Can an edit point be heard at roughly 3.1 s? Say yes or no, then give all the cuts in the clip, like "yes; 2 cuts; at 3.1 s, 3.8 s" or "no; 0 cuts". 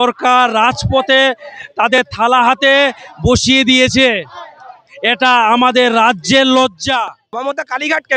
no; 1 cut; at 7.2 s